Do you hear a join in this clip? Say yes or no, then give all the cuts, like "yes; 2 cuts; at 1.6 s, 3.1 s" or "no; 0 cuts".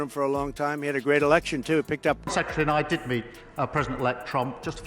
yes; 1 cut; at 2.2 s